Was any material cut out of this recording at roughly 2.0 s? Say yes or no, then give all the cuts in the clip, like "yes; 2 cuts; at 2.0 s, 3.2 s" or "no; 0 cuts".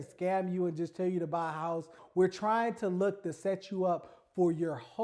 yes; 1 cut; at 2.0 s